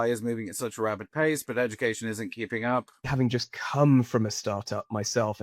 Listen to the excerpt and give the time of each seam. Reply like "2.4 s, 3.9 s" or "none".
3.1 s